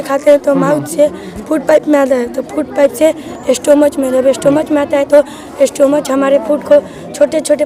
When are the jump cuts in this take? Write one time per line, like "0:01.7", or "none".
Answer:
none